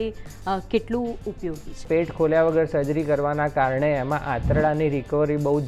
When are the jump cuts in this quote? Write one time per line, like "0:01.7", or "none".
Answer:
0:01.8